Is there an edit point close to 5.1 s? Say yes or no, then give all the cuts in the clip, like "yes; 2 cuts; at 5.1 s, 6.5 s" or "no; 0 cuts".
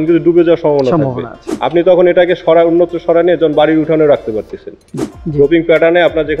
yes; 1 cut; at 5.1 s